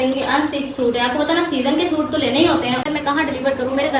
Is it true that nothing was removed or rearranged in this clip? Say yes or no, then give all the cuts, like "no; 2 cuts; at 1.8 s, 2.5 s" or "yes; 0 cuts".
no; 1 cut; at 2.8 s